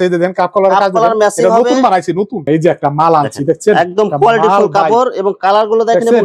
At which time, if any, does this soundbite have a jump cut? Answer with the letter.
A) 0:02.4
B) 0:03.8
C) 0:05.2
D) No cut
A